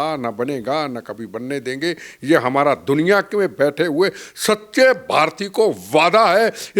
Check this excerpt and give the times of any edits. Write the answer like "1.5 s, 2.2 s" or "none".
none